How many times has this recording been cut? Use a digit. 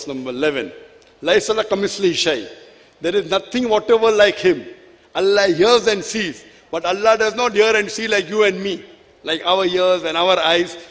0